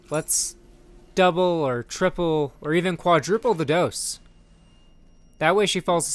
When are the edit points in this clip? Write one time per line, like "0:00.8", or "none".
none